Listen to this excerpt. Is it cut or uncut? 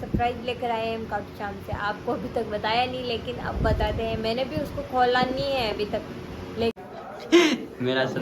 cut